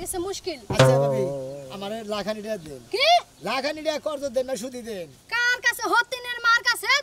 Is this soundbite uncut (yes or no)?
yes